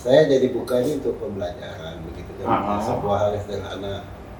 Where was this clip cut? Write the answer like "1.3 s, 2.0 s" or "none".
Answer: none